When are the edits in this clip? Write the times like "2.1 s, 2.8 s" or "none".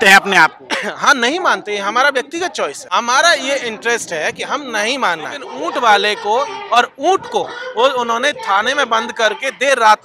2.8 s, 5.5 s